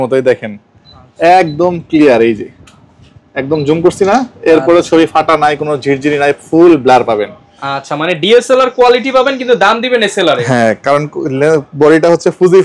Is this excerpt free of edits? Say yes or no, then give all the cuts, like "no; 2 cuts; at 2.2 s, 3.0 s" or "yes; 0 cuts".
yes; 0 cuts